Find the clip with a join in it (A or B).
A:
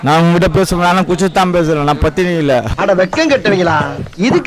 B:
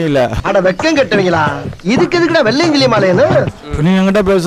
B